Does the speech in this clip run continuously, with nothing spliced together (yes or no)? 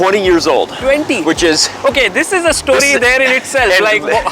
yes